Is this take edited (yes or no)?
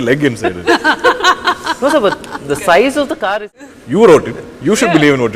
yes